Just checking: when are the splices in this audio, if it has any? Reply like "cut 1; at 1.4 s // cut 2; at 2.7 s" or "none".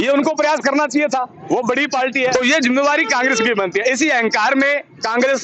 cut 1; at 2.3 s